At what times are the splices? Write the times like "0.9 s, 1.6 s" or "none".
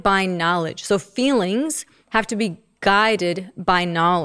none